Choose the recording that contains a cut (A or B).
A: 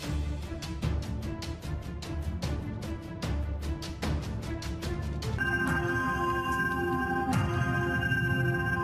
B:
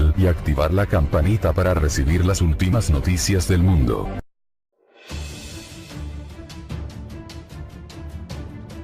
B